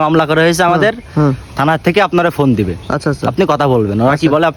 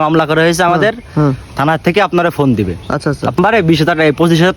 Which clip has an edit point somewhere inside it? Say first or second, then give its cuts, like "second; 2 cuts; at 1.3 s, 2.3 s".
second; 1 cut; at 3.4 s